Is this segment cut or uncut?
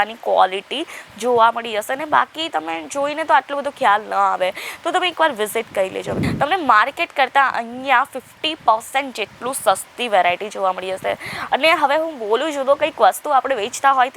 cut